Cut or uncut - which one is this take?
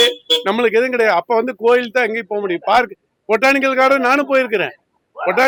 uncut